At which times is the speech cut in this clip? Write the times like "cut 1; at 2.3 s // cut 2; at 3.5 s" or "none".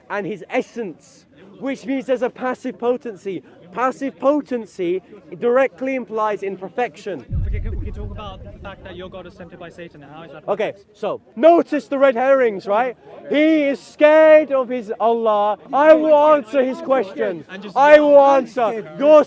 cut 1; at 11.3 s // cut 2; at 15.6 s